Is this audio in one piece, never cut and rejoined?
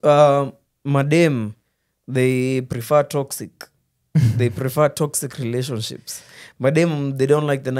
yes; 0 cuts

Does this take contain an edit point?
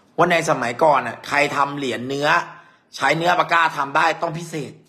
no; 0 cuts

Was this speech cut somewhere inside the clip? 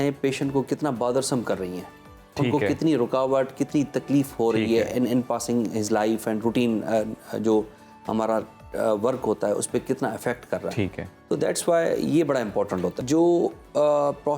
yes; 1 cut; at 13.0 s

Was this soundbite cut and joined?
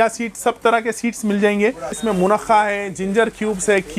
yes; 1 cut; at 2.0 s

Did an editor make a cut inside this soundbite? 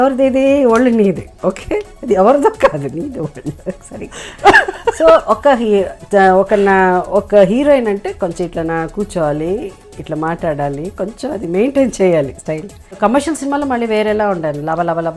yes; 1 cut; at 13.0 s

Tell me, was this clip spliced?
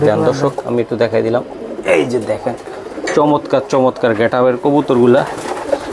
no; 0 cuts

